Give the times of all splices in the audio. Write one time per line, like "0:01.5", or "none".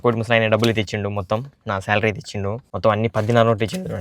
0:02.7

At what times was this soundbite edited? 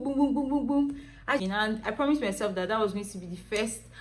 0:01.4

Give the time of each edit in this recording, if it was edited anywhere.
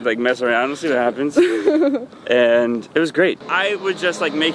0:03.5

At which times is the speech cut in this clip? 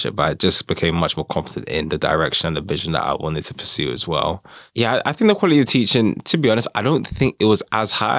0:04.6

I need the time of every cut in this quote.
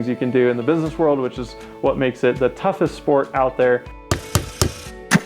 0:04.0

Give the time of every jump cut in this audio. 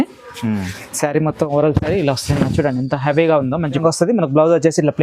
0:03.8

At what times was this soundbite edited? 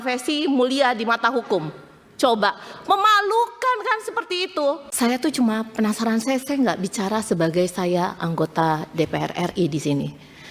0:04.9

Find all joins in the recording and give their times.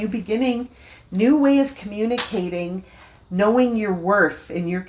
none

